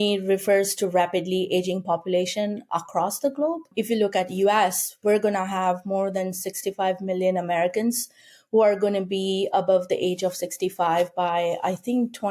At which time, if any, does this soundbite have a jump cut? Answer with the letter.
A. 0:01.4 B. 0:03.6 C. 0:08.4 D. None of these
B